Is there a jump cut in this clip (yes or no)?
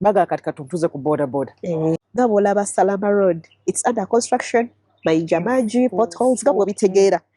yes